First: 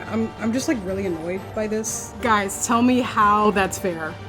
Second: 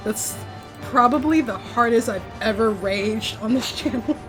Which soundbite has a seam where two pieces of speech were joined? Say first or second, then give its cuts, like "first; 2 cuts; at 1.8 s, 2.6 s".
first; 1 cut; at 2.0 s